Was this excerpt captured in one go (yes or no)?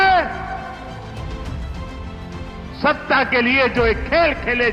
yes